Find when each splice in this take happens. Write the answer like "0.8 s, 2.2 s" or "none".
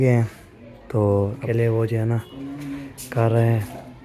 1.4 s